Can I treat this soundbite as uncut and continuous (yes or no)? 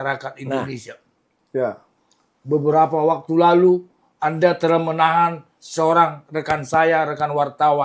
yes